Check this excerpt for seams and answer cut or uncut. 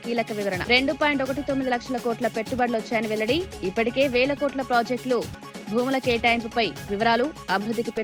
uncut